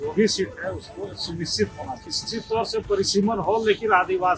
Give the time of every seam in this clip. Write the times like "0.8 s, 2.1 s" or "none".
2.2 s